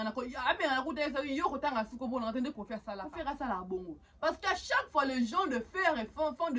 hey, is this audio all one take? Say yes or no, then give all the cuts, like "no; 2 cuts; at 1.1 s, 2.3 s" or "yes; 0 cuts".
no; 1 cut; at 3.0 s